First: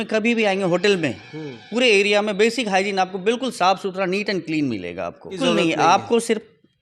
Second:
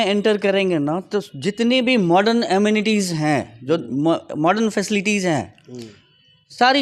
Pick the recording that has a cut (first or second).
first